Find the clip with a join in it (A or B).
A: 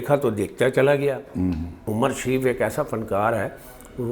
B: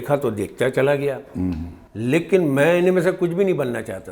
A